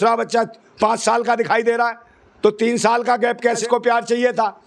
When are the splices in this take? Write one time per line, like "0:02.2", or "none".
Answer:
0:03.6